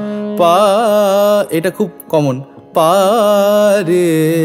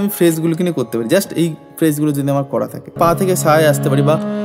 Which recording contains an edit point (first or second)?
second